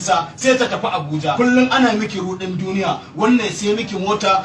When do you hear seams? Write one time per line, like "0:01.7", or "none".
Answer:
0:01.3